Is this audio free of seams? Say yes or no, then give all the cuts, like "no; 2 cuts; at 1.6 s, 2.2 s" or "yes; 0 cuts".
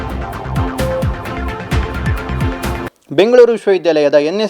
no; 1 cut; at 2.9 s